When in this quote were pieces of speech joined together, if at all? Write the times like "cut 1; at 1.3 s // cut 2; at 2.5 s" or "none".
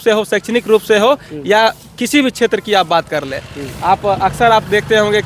none